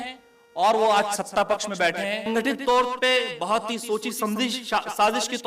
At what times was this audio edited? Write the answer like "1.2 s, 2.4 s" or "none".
2.3 s

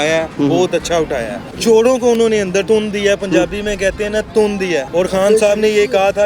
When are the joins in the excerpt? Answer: 1.5 s, 2.6 s, 4.9 s

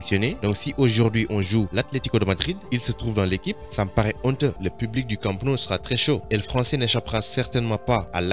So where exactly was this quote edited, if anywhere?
4.6 s

